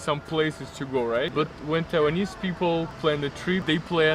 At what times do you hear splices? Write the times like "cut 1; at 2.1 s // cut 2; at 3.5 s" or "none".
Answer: cut 1; at 1.3 s // cut 2; at 3.0 s